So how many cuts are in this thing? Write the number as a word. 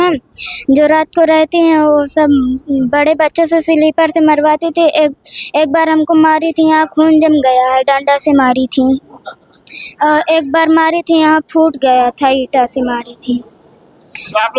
zero